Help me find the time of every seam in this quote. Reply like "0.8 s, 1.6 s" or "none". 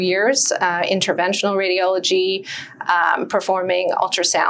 none

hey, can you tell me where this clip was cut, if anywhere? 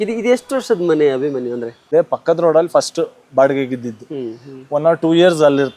1.8 s

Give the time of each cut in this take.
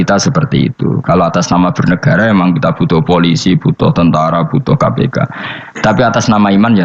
none

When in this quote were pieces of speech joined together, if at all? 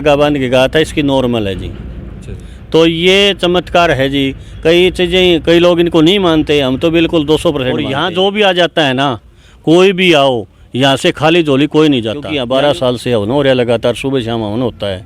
8.0 s, 12.3 s

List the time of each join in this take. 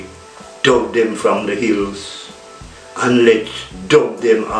none

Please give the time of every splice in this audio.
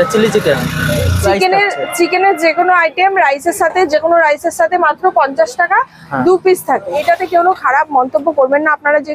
1.2 s, 7.0 s

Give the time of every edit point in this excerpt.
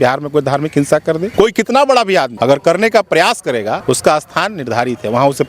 1.3 s, 2.3 s, 3.8 s

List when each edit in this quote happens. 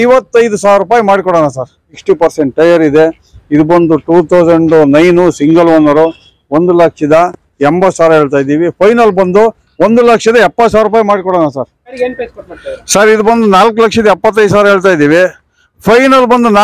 1.9 s, 12.0 s

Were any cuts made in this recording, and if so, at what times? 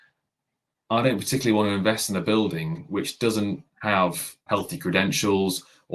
3.7 s, 4.4 s

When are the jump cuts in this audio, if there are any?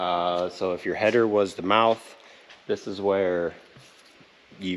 none

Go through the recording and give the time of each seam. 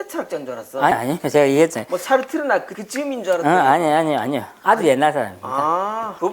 2.8 s

